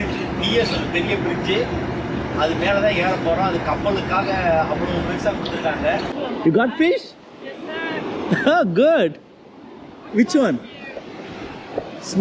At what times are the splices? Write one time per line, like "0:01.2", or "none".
0:06.1